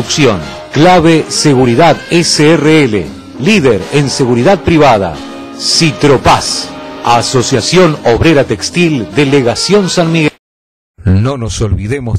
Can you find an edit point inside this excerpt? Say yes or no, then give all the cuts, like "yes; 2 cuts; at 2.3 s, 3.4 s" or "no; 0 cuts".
yes; 1 cut; at 10.3 s